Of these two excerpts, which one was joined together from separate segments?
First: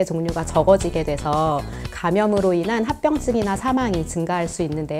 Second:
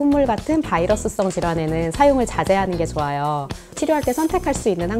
second; 1 cut; at 3.8 s

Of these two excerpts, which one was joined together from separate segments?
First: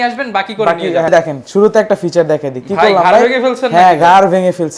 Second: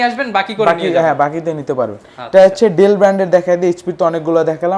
first; 1 cut; at 1.1 s

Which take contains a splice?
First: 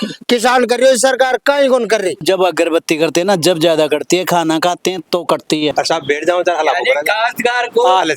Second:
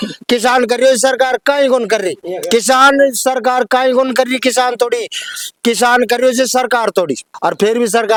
first; 2 cuts; at 2.2 s, 5.7 s

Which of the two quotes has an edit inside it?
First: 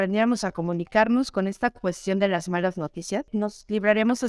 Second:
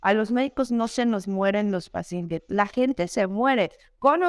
first; 1 cut; at 3.3 s

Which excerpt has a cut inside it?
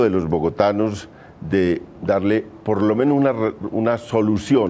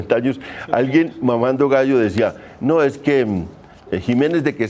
second; 1 cut; at 1.6 s

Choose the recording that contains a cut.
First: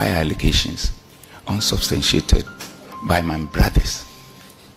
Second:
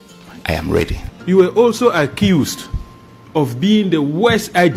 second; 1 cut; at 1.1 s

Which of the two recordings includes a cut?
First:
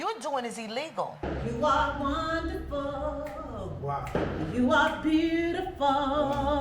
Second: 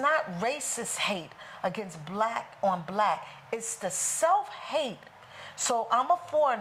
first; 1 cut; at 1.2 s

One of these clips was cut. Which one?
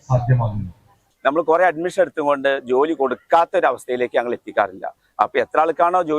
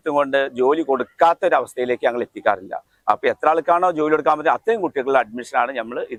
first; 1 cut; at 1.1 s

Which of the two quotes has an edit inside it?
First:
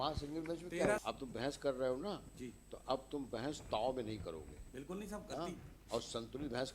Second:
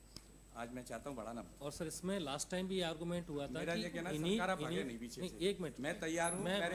first; 1 cut; at 1.0 s

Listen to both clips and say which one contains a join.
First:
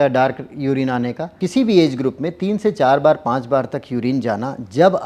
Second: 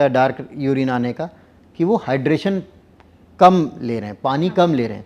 first; 1 cut; at 1.4 s

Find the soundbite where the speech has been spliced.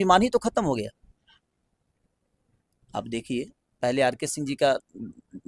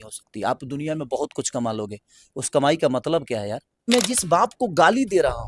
second; 1 cut; at 3.9 s

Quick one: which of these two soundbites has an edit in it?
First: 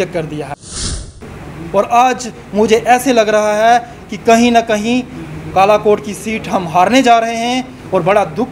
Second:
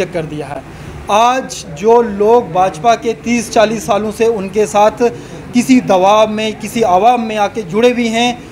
first; 1 cut; at 1.0 s

